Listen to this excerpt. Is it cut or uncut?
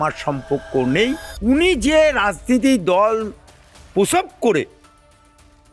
cut